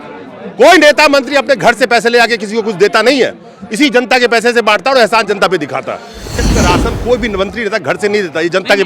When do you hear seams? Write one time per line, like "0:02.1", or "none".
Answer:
0:06.5

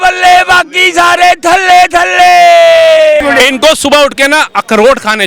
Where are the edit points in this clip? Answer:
0:03.2

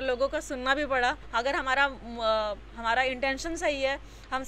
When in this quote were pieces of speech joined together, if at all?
0:01.2

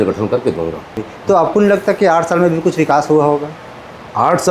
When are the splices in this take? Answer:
0:01.1

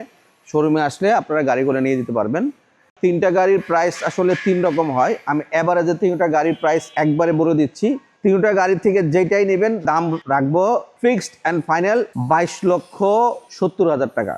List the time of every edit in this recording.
0:02.8
0:06.9
0:08.1
0:09.9
0:10.9
0:12.1
0:13.5

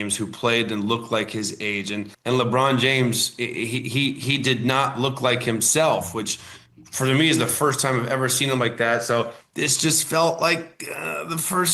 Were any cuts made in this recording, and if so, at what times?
0:02.1
0:09.4

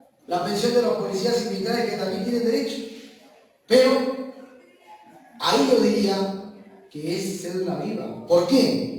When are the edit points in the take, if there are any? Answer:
none

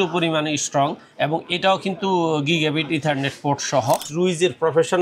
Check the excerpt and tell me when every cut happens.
0:04.1

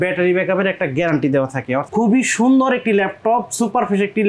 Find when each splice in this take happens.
0:01.8

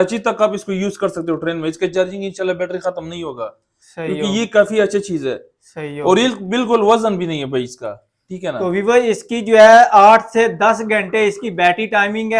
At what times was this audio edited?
none

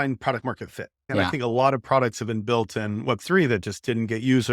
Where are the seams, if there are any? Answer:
0:01.1

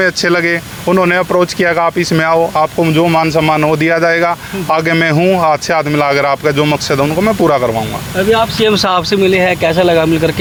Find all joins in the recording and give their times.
none

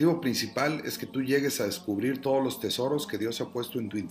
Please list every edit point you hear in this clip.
0:02.0

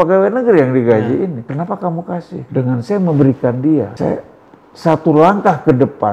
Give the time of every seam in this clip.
0:01.4
0:02.5
0:03.9

